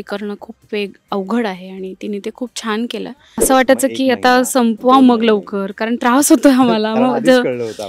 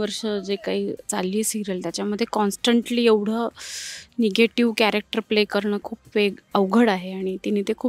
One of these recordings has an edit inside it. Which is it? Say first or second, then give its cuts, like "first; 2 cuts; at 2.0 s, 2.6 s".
first; 1 cut; at 3.4 s